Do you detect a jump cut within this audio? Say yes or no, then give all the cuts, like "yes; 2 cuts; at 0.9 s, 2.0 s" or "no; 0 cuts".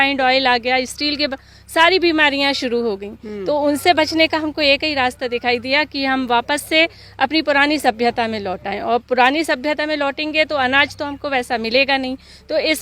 no; 0 cuts